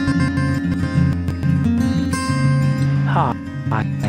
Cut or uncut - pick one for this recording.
uncut